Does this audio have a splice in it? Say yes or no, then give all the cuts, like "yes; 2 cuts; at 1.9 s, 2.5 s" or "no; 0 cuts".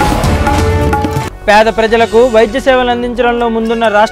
no; 0 cuts